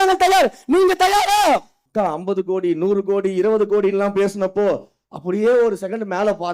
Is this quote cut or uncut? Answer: cut